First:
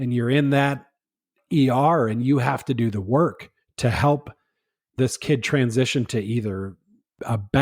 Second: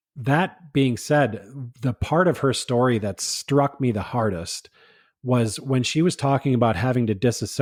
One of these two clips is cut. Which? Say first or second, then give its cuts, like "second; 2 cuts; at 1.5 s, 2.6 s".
first; 1 cut; at 5.0 s